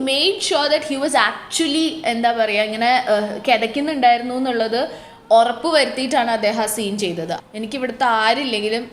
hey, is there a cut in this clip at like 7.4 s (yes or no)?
yes